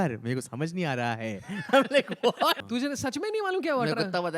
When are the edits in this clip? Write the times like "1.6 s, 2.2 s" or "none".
2.6 s